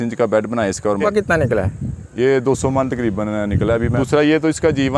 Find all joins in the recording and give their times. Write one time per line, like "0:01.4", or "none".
0:01.0
0:04.0